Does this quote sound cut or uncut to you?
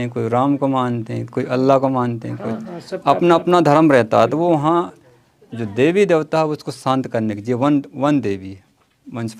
uncut